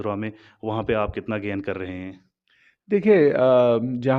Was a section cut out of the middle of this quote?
no; 0 cuts

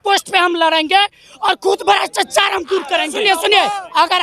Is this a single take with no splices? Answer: no; 1 cut; at 3.1 s

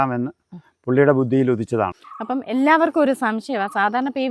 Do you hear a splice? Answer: yes; 1 cut; at 2.0 s

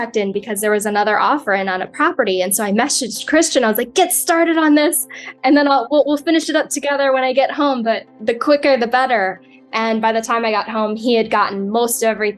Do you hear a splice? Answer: yes; 1 cut; at 3.2 s

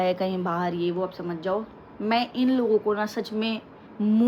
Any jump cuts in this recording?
no; 0 cuts

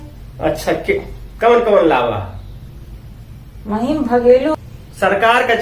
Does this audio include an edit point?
yes; 1 cut; at 4.5 s

